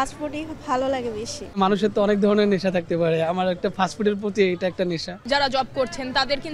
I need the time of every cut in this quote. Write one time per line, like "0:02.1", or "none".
0:01.5
0:05.2